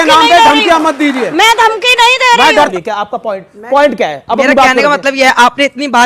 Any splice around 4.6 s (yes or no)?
no